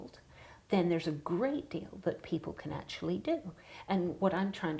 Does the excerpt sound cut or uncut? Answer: uncut